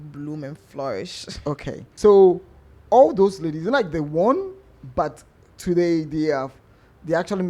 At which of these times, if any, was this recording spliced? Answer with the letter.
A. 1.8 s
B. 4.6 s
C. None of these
A